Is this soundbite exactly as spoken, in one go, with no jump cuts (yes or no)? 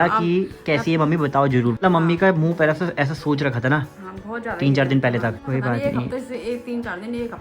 no